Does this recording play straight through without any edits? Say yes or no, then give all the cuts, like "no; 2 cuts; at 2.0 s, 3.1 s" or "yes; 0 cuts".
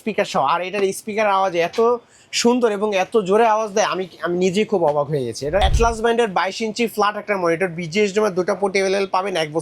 no; 1 cut; at 5.6 s